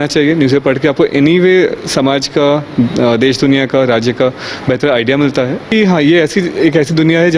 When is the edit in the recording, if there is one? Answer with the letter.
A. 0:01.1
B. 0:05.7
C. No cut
B